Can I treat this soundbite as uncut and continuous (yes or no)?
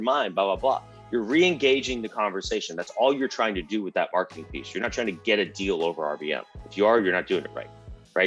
yes